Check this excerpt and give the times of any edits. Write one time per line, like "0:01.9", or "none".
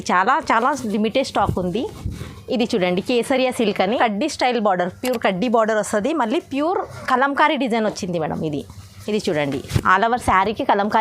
none